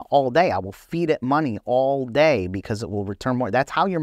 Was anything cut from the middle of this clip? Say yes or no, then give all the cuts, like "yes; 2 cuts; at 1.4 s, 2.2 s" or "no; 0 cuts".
no; 0 cuts